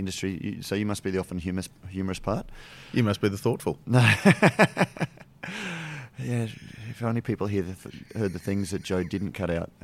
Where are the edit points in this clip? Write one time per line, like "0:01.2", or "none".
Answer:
none